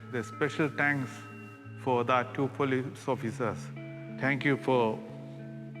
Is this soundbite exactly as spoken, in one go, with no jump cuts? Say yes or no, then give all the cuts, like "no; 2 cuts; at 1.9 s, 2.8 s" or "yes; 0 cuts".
yes; 0 cuts